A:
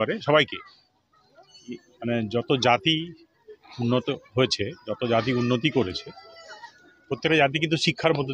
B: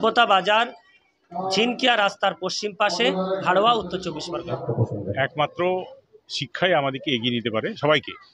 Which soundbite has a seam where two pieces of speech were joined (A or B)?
B